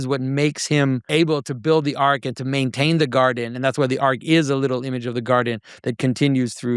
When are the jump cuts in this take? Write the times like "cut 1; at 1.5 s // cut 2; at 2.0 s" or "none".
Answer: cut 1; at 1.1 s